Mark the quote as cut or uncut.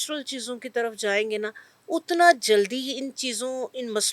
uncut